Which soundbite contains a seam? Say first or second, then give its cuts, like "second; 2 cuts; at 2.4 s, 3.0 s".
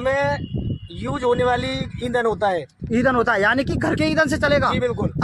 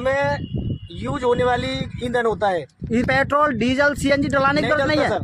second; 1 cut; at 3.0 s